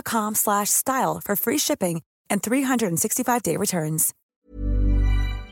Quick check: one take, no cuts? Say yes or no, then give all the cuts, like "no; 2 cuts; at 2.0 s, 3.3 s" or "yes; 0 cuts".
no; 1 cut; at 4.1 s